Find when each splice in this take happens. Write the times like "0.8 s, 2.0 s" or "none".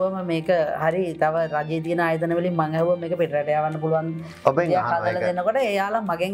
none